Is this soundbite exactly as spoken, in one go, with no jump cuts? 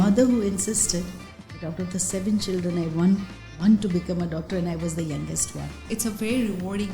no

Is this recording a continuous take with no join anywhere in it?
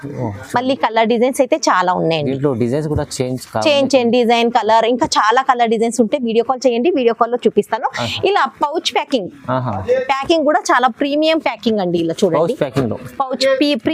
yes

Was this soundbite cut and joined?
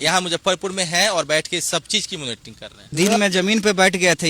no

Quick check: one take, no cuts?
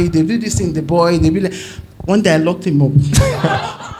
yes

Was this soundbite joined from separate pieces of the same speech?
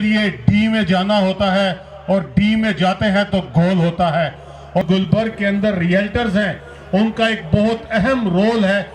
yes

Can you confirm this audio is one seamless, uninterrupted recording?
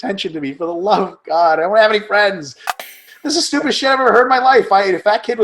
no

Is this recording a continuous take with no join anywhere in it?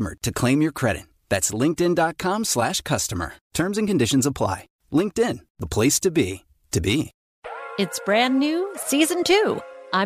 no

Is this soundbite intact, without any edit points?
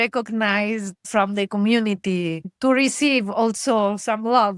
no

